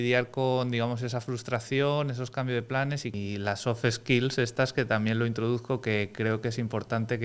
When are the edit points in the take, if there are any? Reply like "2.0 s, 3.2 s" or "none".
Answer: 3.1 s